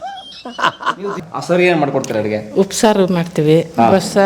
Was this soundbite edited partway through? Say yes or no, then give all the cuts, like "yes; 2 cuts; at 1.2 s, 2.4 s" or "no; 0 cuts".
yes; 1 cut; at 1.1 s